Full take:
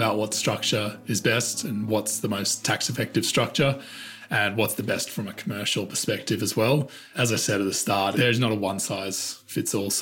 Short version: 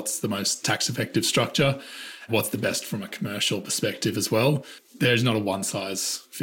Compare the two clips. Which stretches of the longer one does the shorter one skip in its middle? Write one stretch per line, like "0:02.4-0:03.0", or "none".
0:04.3-0:04.5
0:07.2-0:08.1